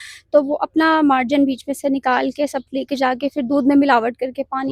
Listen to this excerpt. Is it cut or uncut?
uncut